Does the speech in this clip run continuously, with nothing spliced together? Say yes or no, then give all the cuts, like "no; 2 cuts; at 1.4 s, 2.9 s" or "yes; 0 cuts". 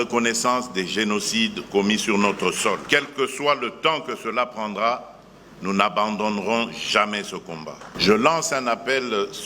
no; 1 cut; at 7.8 s